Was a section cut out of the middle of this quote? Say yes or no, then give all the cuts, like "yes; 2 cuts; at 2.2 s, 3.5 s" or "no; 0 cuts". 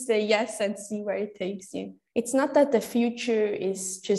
yes; 1 cut; at 1.9 s